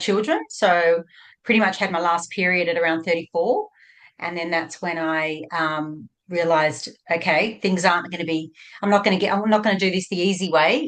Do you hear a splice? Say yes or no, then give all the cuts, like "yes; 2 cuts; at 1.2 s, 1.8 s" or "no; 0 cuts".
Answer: no; 0 cuts